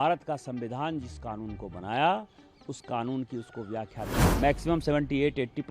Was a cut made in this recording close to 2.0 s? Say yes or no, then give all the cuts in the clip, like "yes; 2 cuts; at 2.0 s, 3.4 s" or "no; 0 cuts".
no; 1 cut; at 4.2 s